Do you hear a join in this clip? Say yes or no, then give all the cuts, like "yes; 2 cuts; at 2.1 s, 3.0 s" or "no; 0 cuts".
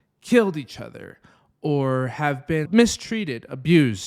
yes; 1 cut; at 2.7 s